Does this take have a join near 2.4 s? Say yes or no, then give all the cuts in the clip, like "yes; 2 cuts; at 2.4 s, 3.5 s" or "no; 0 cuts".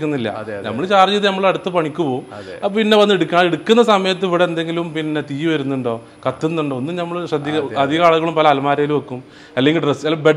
no; 0 cuts